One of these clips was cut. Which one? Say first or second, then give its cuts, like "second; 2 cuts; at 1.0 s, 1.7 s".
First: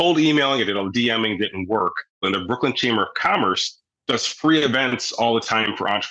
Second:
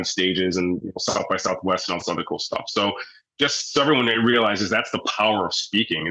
first; 1 cut; at 2.2 s